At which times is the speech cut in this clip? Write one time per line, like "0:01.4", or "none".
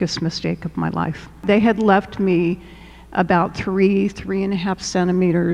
0:01.4